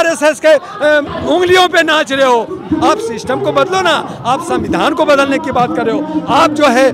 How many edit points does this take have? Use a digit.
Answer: 2